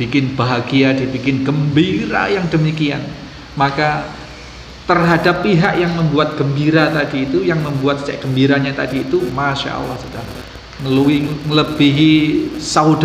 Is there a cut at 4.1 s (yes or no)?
no